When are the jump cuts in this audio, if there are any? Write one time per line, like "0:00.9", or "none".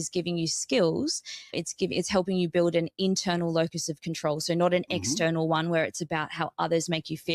0:01.5